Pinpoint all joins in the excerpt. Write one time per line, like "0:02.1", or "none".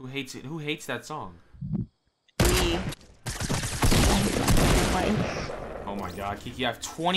0:02.9